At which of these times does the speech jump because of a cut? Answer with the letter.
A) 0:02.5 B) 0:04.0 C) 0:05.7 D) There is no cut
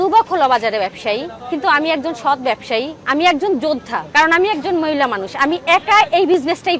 B